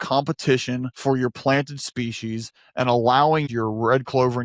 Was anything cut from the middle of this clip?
yes; 2 cuts; at 0.9 s, 3.5 s

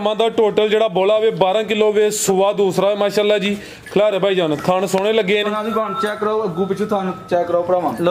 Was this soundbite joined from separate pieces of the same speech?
no; 0 cuts

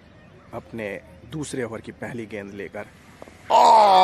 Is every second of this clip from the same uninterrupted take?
yes; 0 cuts

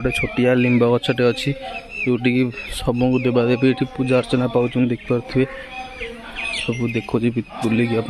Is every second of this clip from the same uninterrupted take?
yes; 0 cuts

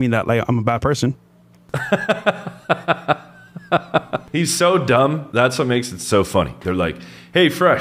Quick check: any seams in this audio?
no; 0 cuts

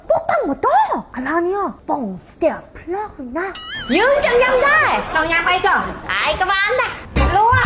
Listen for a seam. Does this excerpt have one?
yes; 1 cut; at 3.7 s

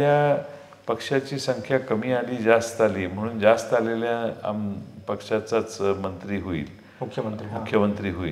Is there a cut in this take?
no; 0 cuts

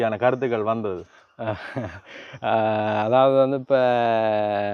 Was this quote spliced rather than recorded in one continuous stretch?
no; 0 cuts

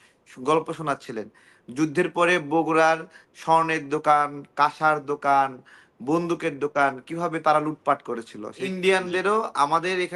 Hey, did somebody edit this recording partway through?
yes; 1 cut; at 8.6 s

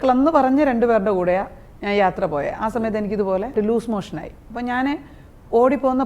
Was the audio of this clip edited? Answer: yes; 1 cut; at 3.5 s

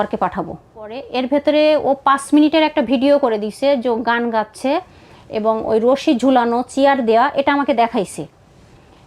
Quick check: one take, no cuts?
no; 1 cut; at 1.0 s

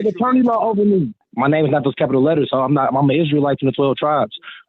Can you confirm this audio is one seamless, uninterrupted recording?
no; 1 cut; at 1.2 s

